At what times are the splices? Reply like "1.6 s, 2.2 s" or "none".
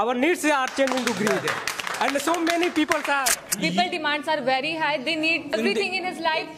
3.4 s, 5.5 s